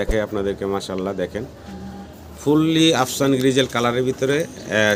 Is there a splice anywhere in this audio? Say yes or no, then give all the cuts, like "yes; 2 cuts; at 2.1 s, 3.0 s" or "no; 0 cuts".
no; 0 cuts